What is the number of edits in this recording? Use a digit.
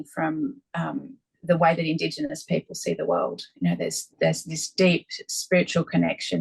0